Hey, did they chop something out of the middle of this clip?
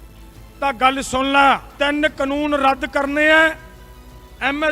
yes; 1 cut; at 1.7 s

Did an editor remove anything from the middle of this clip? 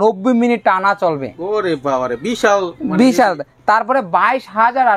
no; 0 cuts

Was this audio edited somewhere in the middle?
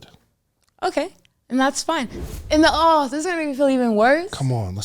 yes; 1 cut; at 2.2 s

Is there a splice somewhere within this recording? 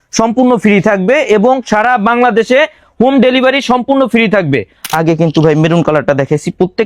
yes; 1 cut; at 4.9 s

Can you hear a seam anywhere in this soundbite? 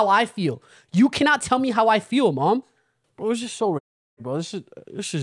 yes; 1 cut; at 3.0 s

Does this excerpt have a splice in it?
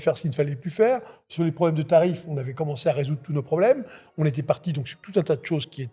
no; 0 cuts

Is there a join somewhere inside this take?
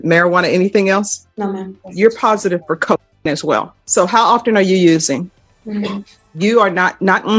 yes; 3 cuts; at 1.8 s, 3.8 s, 5.4 s

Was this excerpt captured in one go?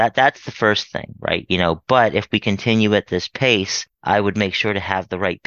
yes; 0 cuts

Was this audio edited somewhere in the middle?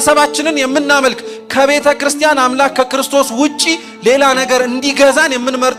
no; 0 cuts

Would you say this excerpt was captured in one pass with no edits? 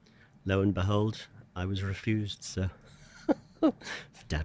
yes; 0 cuts

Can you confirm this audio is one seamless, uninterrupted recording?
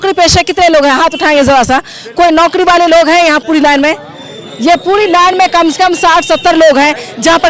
yes; 0 cuts

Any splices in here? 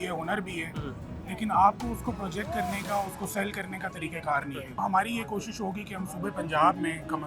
yes; 1 cut; at 4.8 s

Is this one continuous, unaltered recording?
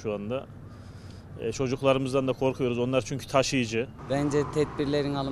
no; 1 cut; at 4.0 s

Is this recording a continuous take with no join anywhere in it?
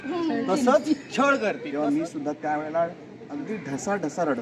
no; 1 cut; at 1.1 s

